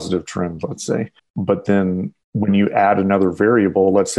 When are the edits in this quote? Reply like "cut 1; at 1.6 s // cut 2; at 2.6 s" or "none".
cut 1; at 1.2 s // cut 2; at 2.2 s